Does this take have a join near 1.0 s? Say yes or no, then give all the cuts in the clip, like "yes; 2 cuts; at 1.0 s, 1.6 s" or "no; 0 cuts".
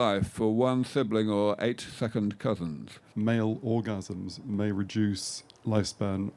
no; 1 cut; at 3.1 s